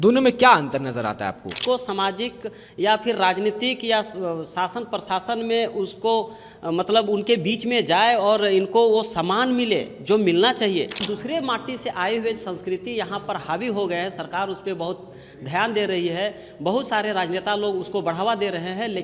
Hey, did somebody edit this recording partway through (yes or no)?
yes